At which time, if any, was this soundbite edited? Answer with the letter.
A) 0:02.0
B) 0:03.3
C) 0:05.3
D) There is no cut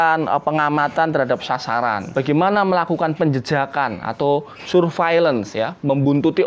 A